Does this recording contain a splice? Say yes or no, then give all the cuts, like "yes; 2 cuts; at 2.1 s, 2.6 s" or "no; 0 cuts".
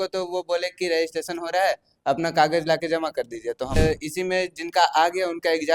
yes; 1 cut; at 3.8 s